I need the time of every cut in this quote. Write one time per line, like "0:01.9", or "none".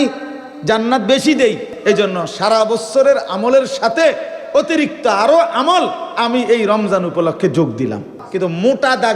0:01.7
0:08.1